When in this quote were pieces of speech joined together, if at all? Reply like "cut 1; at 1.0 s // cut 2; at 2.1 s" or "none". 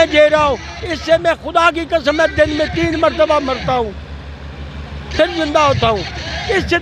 none